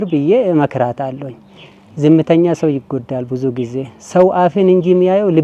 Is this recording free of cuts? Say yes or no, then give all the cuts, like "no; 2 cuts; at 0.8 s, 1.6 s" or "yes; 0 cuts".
yes; 0 cuts